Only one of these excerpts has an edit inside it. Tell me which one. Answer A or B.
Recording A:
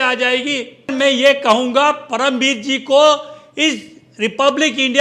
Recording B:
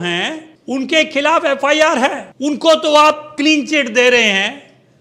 A